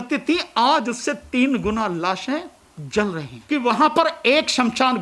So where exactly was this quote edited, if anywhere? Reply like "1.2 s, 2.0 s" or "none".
3.3 s